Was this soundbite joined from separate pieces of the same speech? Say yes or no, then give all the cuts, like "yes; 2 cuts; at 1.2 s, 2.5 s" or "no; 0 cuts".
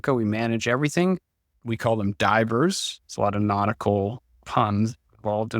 yes; 1 cut; at 1.5 s